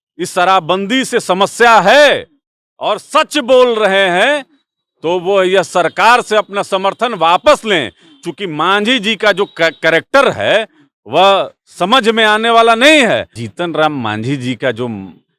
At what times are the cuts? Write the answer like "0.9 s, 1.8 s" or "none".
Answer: 13.4 s